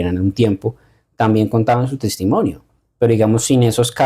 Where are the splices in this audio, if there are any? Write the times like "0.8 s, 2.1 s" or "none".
none